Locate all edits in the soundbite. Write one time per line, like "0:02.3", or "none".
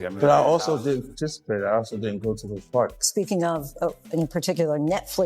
0:03.0

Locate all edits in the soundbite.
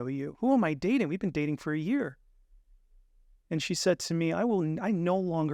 none

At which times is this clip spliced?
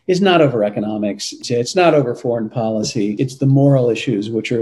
0:01.4
0:03.2

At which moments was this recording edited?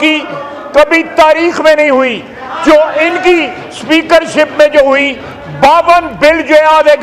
none

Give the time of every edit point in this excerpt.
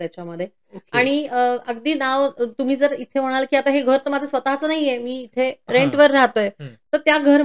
none

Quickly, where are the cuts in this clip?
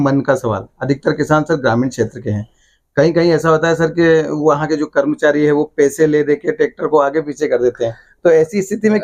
none

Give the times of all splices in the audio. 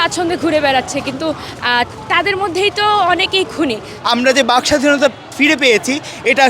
0:03.9

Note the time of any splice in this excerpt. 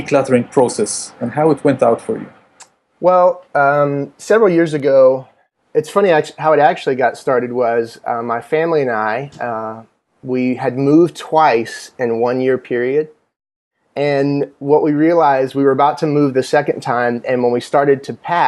0:13.3

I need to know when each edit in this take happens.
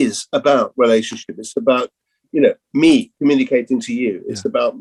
none

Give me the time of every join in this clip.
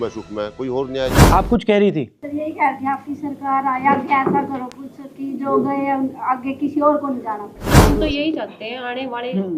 0:01.2
0:07.8

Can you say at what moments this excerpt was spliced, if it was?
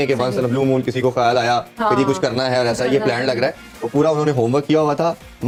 none

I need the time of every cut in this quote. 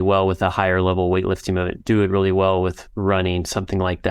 none

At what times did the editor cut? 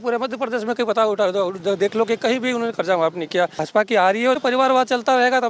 0:03.7
0:04.4

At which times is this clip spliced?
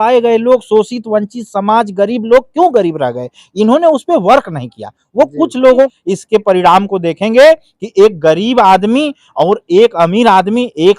0:06.0

